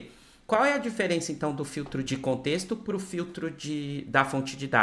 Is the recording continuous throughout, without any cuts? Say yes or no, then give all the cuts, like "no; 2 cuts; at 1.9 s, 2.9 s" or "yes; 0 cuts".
no; 1 cut; at 2.1 s